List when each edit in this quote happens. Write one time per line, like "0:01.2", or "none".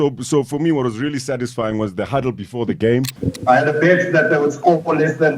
0:03.1